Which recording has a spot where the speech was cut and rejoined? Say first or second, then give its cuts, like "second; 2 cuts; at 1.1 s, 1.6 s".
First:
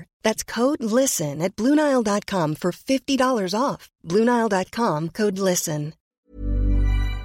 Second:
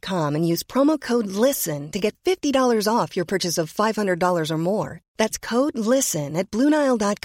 first; 1 cut; at 6.1 s